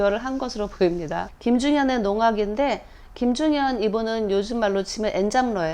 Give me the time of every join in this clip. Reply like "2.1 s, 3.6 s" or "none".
1.3 s

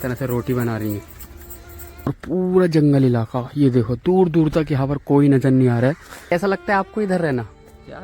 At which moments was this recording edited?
2.1 s, 6.3 s

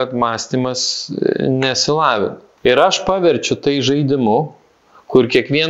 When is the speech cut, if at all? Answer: 2.4 s

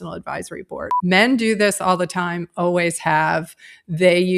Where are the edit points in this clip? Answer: 0.9 s

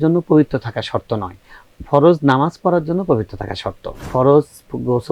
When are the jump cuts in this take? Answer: 4.1 s

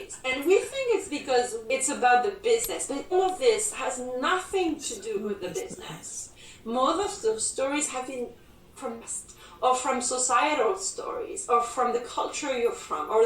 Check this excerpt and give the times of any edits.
1.6 s

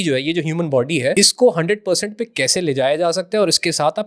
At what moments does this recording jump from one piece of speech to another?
1.1 s

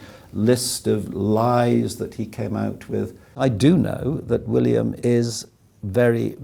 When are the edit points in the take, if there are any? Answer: 3.4 s, 4.9 s

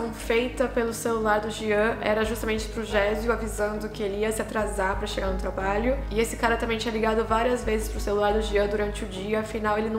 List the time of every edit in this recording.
none

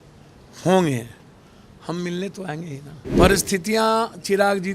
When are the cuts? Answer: 3.1 s

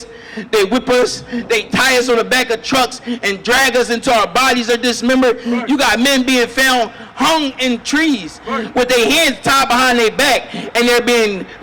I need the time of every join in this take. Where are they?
5.4 s

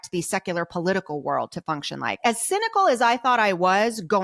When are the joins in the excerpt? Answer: 2.2 s

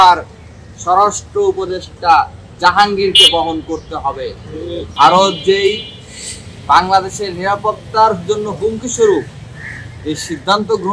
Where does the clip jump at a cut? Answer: 4.9 s

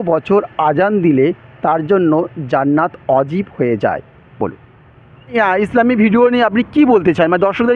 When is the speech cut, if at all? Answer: 5.3 s

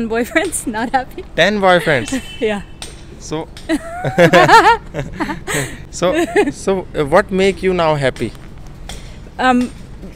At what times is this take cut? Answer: none

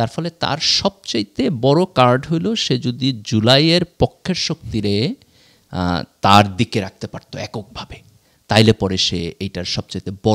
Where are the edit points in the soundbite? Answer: none

